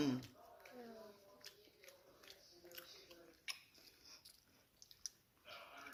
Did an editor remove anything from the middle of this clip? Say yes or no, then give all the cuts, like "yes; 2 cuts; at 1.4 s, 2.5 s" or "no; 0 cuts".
no; 0 cuts